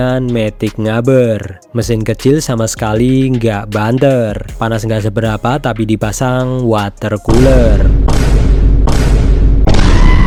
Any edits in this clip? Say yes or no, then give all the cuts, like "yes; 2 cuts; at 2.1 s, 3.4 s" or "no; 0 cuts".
no; 0 cuts